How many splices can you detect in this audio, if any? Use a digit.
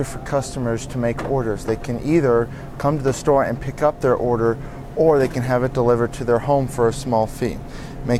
0